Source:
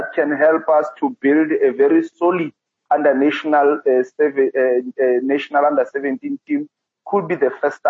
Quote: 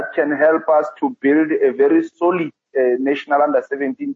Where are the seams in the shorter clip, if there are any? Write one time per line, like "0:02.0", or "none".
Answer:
0:02.7